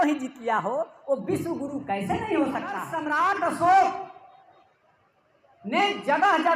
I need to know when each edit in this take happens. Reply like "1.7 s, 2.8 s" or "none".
2.9 s